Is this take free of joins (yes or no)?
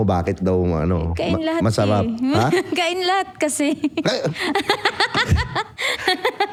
yes